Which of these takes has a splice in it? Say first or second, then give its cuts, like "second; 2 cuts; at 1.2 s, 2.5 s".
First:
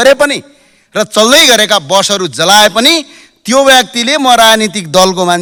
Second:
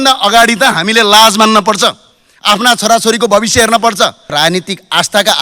second; 1 cut; at 4.3 s